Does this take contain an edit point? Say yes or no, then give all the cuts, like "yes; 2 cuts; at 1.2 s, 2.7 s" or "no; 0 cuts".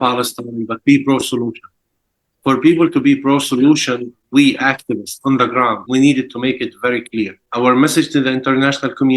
yes; 3 cuts; at 4.2 s, 5.8 s, 7.4 s